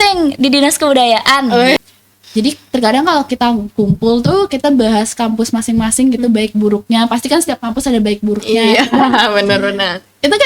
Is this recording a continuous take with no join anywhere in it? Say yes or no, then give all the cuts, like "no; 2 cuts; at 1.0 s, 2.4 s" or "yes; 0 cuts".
no; 1 cut; at 1.8 s